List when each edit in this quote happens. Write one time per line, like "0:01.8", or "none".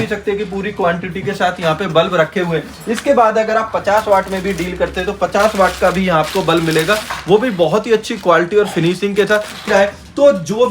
0:09.6